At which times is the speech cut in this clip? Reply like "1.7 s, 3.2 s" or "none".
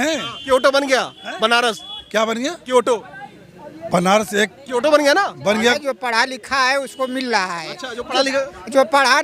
5.8 s